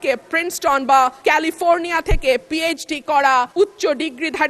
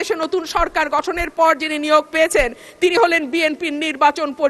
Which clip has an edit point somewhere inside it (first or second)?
first